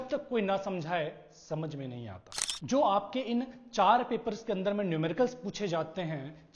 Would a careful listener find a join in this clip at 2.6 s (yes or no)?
yes